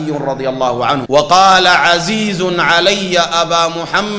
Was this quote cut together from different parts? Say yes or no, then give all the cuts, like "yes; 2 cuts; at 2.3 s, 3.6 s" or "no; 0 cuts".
yes; 1 cut; at 1.0 s